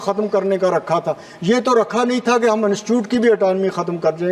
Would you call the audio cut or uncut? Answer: uncut